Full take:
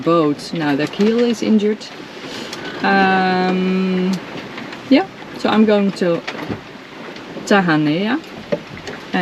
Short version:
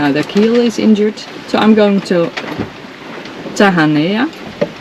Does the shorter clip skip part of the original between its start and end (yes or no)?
yes